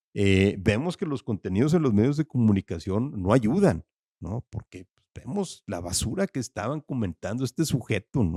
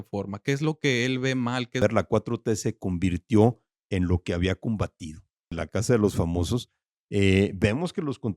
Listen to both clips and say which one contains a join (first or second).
second